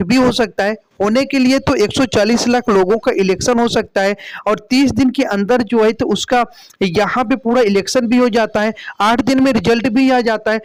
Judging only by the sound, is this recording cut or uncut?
uncut